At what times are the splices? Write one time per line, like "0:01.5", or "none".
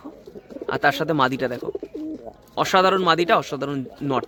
none